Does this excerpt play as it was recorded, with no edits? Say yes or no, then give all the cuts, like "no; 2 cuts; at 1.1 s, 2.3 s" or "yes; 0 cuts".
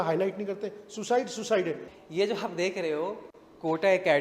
no; 1 cut; at 1.8 s